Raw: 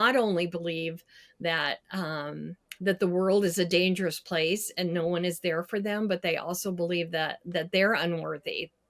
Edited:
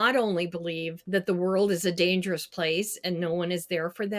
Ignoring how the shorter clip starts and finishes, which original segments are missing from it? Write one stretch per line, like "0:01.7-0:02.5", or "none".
0:00.9-0:02.7